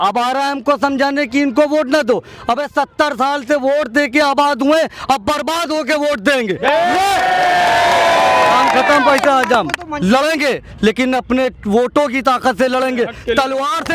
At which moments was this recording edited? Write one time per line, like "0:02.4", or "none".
0:09.9